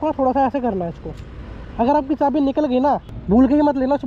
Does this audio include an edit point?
yes; 1 cut; at 3.1 s

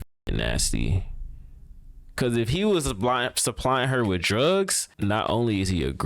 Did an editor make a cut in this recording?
yes; 1 cut; at 4.8 s

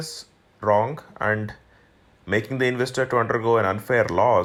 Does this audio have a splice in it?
no; 0 cuts

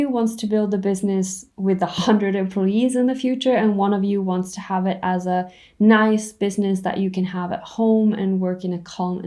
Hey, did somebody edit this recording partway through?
yes; 1 cut; at 1.4 s

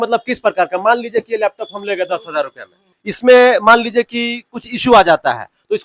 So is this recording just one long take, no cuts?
no; 1 cut; at 2.8 s

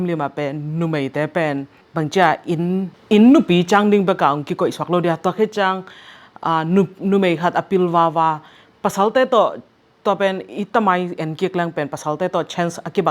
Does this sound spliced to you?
yes; 2 cuts; at 1.8 s, 3.0 s

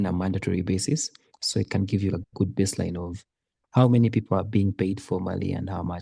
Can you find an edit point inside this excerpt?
yes; 1 cut; at 2.1 s

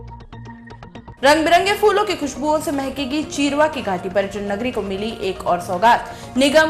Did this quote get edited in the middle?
yes; 1 cut; at 1.1 s

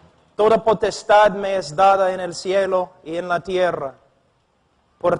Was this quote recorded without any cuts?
no; 1 cut; at 2.3 s

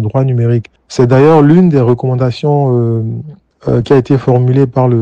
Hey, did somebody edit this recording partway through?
no; 0 cuts

